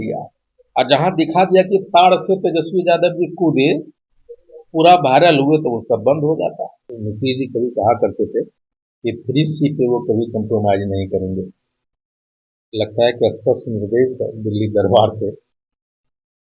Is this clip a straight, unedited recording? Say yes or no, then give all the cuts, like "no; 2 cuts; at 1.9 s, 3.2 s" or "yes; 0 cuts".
no; 1 cut; at 7.0 s